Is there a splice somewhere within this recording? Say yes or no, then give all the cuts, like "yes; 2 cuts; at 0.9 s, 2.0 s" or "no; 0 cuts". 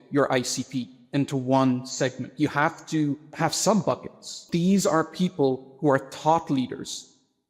yes; 2 cuts; at 3.2 s, 4.5 s